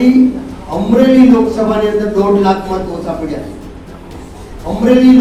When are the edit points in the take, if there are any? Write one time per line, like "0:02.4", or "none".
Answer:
none